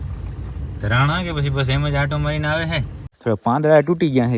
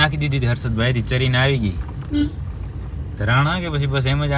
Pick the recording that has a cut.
first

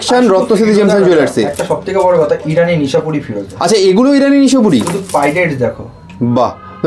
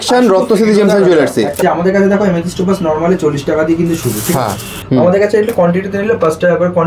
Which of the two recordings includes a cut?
second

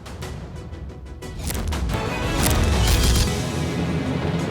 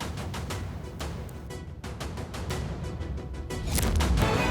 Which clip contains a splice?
first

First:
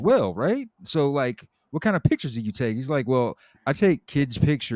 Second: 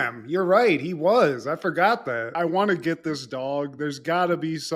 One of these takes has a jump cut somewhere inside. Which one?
second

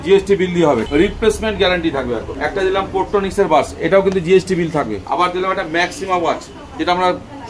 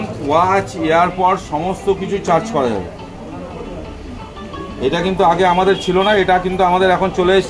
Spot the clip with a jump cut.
first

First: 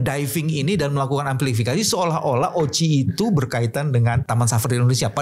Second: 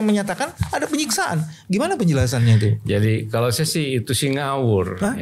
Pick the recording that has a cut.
first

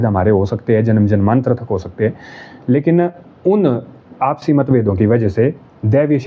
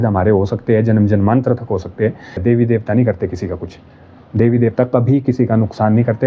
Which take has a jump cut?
second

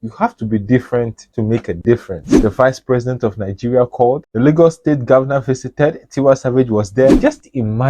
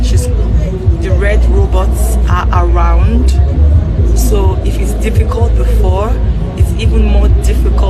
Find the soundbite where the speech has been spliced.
first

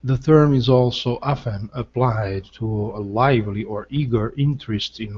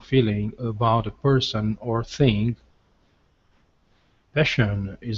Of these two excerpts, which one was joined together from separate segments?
second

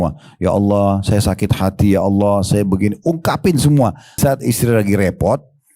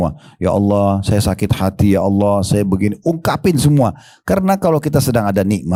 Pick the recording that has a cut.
first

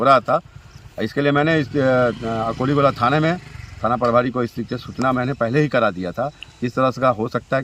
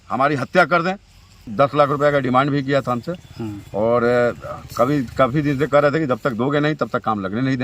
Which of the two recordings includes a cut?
second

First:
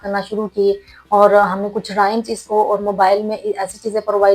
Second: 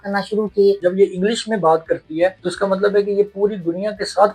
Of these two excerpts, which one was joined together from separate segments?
second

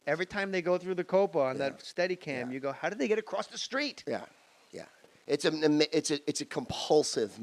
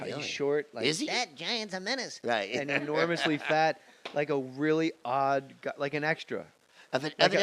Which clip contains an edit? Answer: first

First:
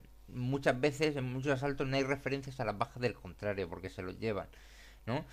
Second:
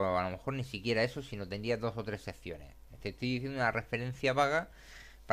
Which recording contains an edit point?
first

